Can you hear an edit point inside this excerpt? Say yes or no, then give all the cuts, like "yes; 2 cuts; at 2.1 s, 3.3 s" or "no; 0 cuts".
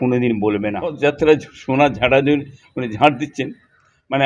yes; 1 cut; at 1.0 s